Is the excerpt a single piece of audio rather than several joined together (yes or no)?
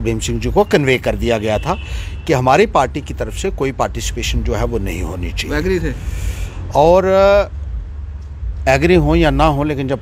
yes